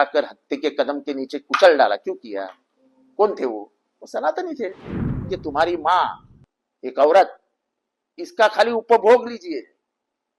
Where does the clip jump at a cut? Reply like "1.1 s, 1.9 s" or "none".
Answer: 5.3 s

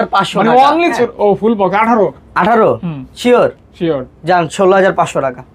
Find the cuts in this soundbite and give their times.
1.0 s

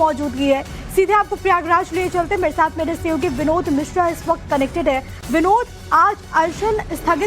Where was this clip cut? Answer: 5.8 s

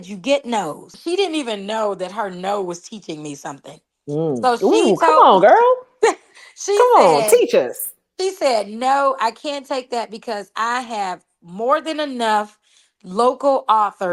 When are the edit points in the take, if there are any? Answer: 0.9 s

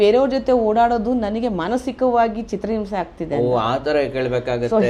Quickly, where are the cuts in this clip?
none

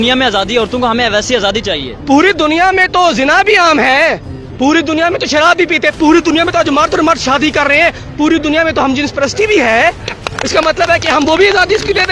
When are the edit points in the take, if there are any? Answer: none

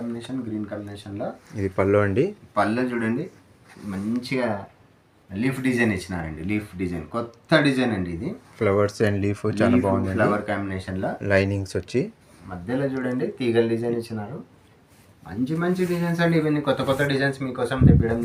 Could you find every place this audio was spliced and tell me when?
none

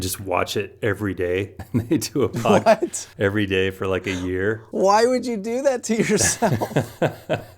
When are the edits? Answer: 1.6 s, 3.0 s, 4.6 s

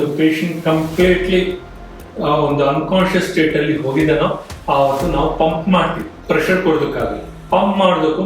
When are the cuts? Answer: 6.1 s

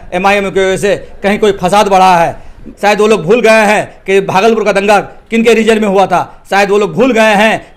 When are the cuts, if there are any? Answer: 2.7 s

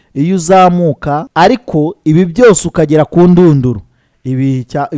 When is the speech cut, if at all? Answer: 1.2 s

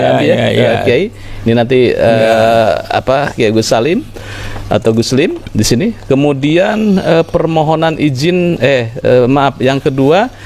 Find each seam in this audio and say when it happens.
none

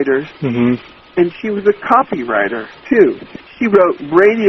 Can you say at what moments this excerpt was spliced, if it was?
3.3 s

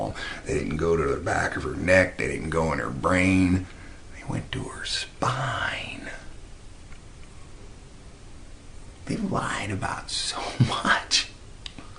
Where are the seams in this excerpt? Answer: 9.6 s

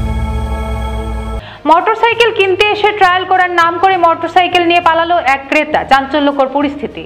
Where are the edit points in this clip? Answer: 1.4 s

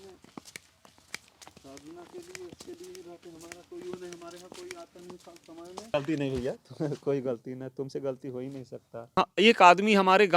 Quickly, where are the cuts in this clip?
5.9 s, 9.1 s

